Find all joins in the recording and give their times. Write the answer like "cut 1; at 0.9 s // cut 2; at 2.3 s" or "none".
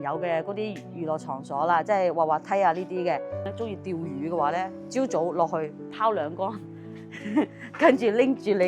cut 1; at 3.4 s